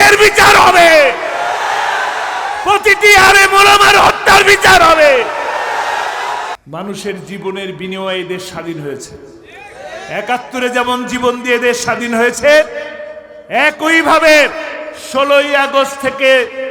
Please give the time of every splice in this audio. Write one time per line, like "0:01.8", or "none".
0:06.6